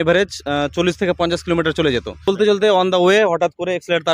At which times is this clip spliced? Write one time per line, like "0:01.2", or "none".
0:02.3